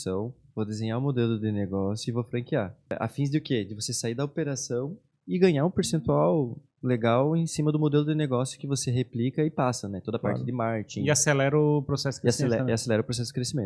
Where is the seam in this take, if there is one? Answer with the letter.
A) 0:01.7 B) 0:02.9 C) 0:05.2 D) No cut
B